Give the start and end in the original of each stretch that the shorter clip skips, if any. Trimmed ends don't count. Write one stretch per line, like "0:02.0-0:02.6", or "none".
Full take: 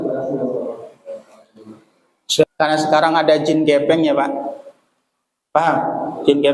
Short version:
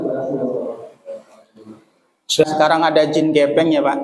0:02.5-0:02.8